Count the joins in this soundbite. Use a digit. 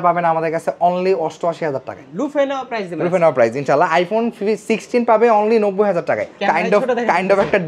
2